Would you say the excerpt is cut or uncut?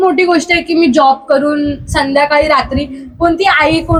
uncut